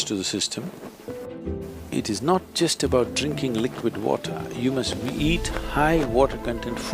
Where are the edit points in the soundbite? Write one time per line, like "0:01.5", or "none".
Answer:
0:01.3